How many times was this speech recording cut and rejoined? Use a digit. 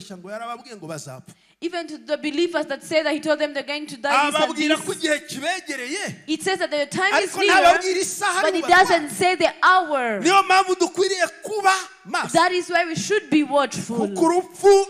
0